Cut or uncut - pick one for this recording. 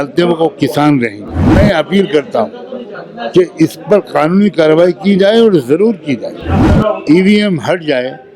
cut